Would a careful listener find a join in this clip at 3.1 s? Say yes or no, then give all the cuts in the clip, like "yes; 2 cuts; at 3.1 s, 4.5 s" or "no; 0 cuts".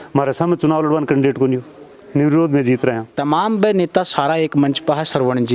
yes; 1 cut; at 3.1 s